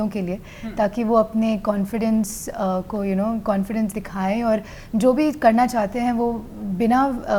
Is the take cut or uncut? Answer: uncut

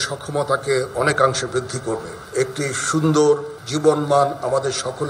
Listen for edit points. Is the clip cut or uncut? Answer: cut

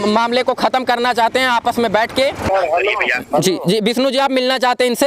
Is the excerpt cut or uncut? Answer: cut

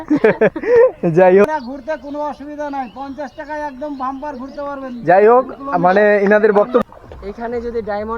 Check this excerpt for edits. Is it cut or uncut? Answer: cut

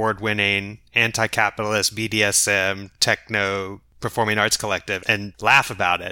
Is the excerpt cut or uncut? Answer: uncut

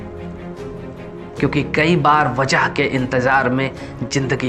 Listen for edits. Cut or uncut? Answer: uncut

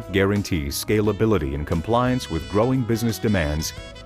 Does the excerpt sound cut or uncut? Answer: uncut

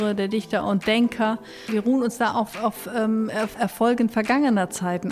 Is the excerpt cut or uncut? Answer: cut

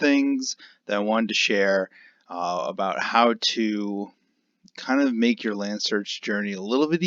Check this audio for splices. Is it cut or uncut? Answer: uncut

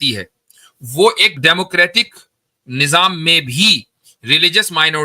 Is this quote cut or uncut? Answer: cut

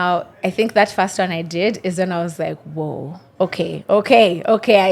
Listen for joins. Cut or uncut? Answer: uncut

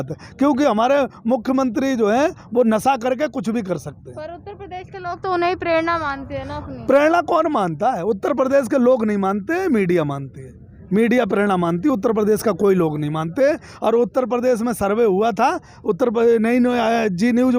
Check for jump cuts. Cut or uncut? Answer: uncut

